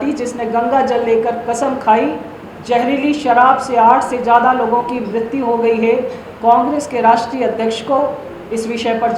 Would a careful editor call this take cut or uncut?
uncut